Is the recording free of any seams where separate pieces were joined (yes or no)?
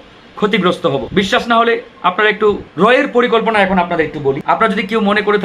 no